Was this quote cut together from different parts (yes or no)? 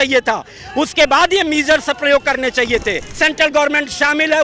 yes